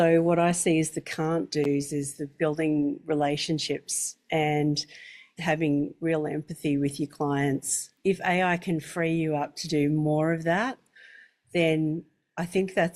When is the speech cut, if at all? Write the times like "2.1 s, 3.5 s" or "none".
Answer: 5.3 s, 8.0 s

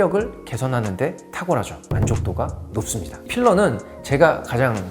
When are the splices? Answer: 1.9 s, 3.1 s

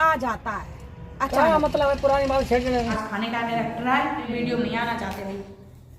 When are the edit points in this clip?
3.1 s, 4.3 s

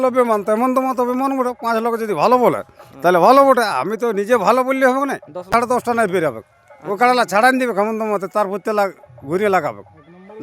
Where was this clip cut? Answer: 5.5 s

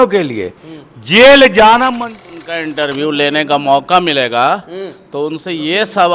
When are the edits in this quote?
2.1 s

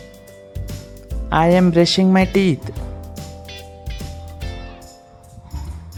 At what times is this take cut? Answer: none

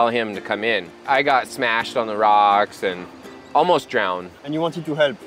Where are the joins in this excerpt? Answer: 1.0 s, 4.3 s

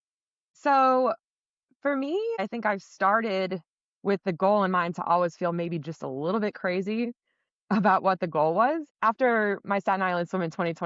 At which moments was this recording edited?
8.9 s

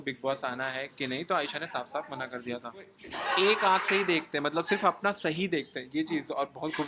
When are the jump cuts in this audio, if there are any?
3.0 s

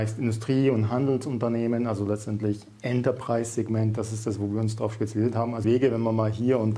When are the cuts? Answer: 5.6 s

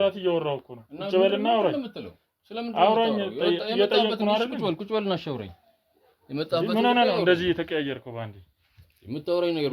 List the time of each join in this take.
none

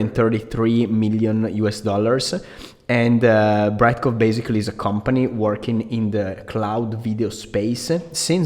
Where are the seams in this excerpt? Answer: none

